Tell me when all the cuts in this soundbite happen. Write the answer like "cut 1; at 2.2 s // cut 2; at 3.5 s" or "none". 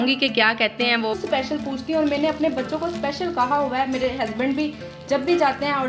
cut 1; at 1.2 s